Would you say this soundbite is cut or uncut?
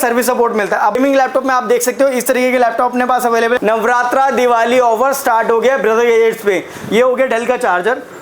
cut